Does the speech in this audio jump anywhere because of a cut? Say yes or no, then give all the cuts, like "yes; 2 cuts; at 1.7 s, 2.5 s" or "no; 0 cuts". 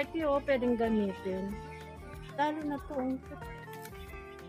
yes; 1 cut; at 3.3 s